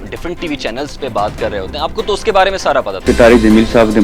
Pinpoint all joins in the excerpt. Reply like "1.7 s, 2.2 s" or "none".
3.1 s